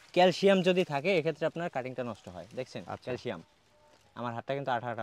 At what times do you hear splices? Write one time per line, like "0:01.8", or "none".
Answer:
none